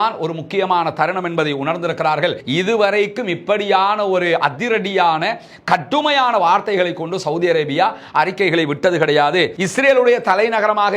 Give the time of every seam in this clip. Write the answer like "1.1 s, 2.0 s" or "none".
2.4 s, 9.6 s